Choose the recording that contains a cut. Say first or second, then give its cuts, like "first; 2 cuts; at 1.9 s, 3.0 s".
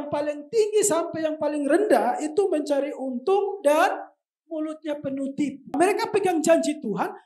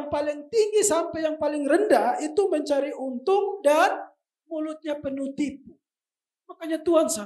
first; 1 cut; at 5.8 s